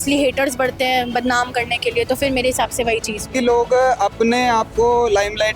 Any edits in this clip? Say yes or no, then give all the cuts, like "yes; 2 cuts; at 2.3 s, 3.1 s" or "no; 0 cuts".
yes; 1 cut; at 3.3 s